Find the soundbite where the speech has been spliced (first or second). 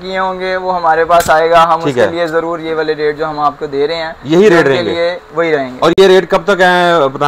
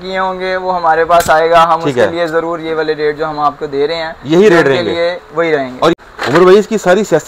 second